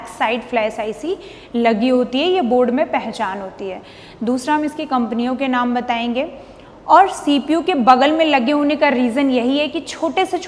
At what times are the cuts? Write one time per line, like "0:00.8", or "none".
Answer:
none